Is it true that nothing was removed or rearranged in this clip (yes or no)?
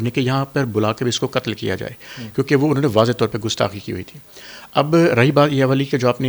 yes